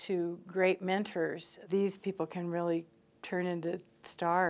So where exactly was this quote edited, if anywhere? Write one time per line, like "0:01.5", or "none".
0:01.6